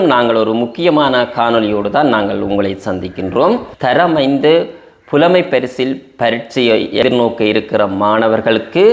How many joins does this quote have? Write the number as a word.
one